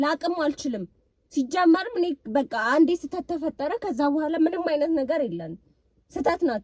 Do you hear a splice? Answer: no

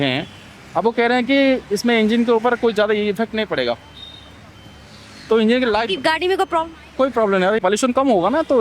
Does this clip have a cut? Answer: yes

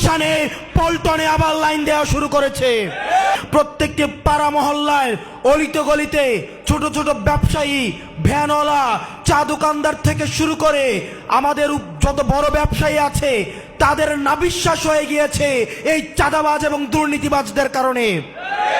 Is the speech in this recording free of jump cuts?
no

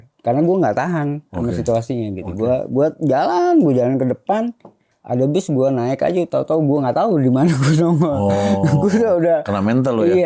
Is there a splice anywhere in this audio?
no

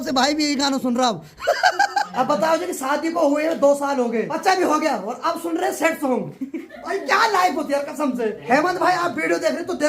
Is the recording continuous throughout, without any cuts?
no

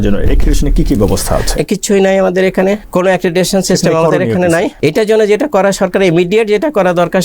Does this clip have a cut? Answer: yes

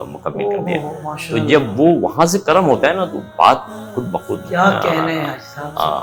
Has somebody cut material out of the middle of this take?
no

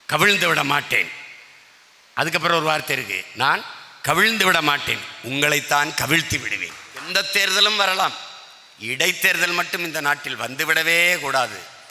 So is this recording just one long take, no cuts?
no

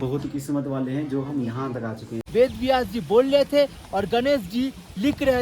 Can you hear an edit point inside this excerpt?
yes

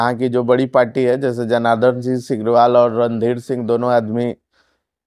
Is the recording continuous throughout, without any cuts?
yes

